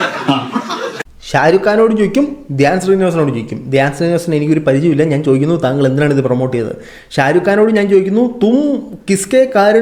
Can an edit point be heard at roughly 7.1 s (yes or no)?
no